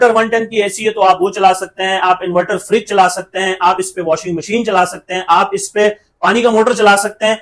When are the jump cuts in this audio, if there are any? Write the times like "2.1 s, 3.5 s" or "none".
none